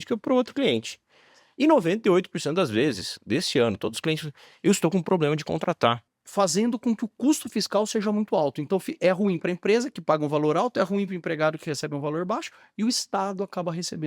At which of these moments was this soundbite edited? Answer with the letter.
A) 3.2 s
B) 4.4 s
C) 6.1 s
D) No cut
C